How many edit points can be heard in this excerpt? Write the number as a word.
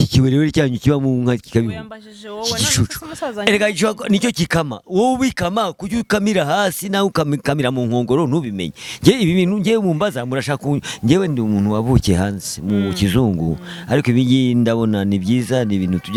zero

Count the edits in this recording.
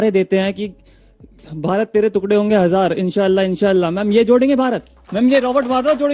one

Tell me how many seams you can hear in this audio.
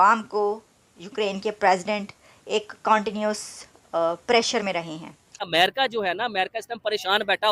one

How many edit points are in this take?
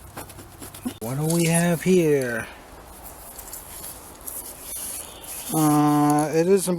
one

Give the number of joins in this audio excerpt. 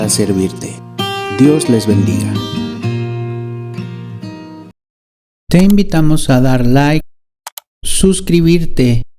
one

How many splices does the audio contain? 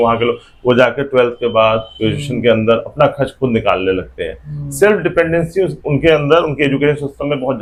zero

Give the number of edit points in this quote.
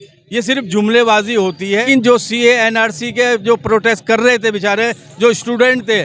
one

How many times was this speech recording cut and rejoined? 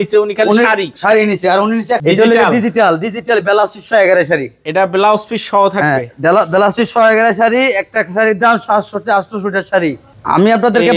two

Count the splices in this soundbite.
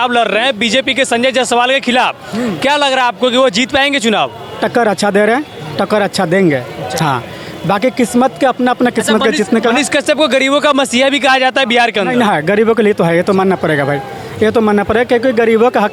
zero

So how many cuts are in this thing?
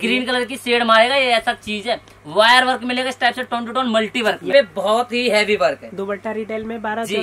one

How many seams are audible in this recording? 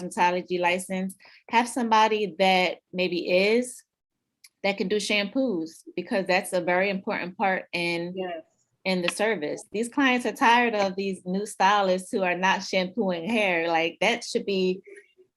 one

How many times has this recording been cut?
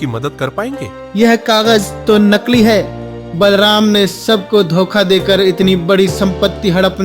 one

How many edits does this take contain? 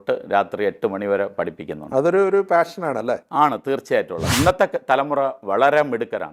one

